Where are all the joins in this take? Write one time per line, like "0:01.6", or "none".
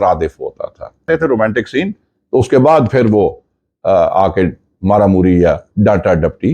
0:01.0